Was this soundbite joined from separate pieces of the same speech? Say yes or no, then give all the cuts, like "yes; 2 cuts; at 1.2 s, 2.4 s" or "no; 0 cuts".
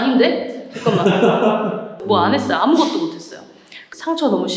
yes; 1 cut; at 2.0 s